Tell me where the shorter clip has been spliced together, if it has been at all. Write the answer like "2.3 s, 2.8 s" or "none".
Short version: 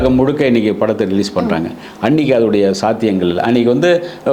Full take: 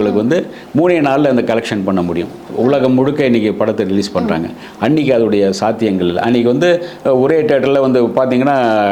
none

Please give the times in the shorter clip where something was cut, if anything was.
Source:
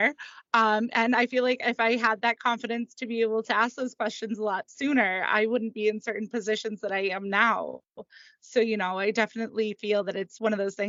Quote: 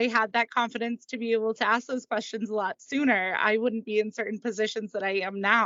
none

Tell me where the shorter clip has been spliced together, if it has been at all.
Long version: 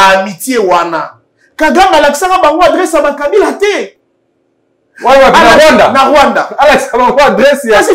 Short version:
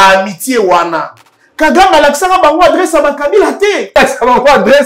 4.0 s

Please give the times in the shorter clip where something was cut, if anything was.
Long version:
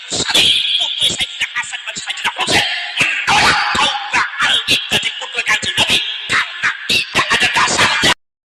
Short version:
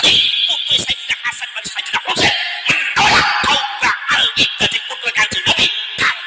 none

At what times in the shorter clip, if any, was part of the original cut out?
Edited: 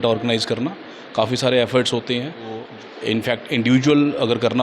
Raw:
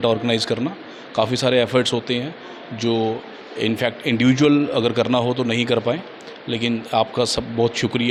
2.7 s

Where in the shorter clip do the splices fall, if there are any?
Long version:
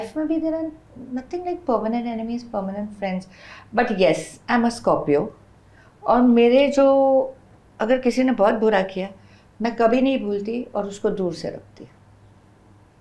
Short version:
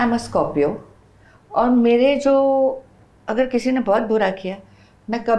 none

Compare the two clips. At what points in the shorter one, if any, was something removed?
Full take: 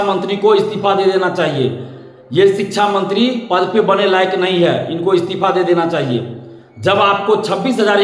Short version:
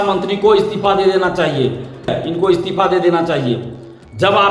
2.2 s

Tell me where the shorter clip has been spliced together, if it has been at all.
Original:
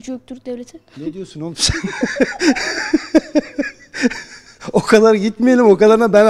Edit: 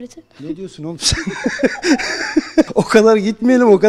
2.7 s

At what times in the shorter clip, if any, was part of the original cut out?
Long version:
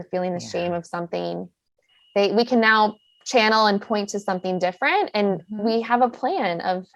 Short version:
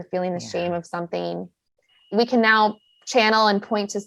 2.1 s

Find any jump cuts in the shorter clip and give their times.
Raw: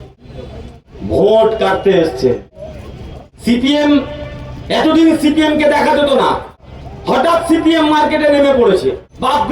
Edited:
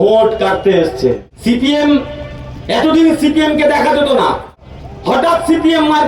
1.3 s

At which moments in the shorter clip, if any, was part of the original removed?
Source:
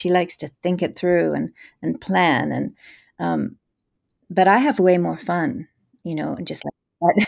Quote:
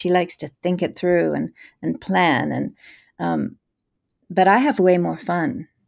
none

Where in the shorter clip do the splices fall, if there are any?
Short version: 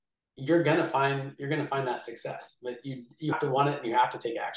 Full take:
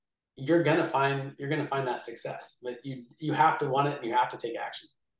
3.3 s

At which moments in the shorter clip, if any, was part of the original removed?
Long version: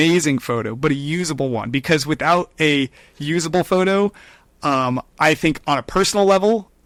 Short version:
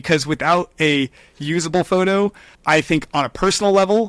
2.5 s

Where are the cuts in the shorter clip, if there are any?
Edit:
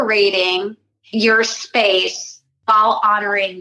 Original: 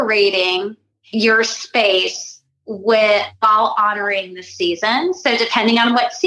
2.6 s

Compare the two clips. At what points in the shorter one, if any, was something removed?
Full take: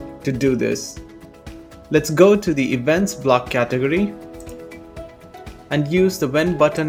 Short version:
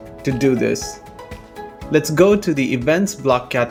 none

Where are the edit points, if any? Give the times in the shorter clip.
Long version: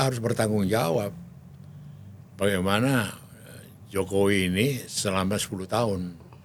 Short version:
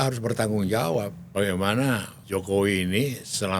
1.2 s, 2.1 s

